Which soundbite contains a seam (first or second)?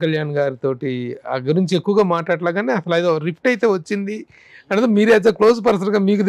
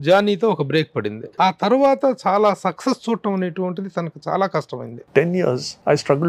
second